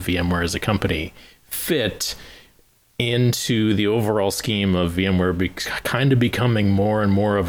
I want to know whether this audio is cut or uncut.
uncut